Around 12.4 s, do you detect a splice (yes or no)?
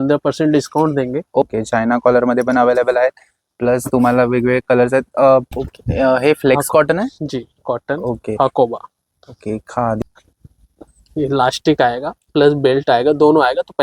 no